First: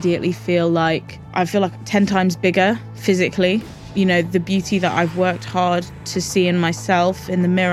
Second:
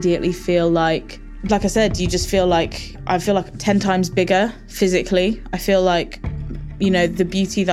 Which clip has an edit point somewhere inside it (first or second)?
first